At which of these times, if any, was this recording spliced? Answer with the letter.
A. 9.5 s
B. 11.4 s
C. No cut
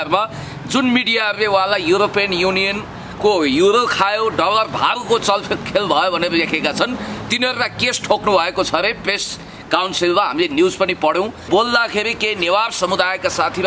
B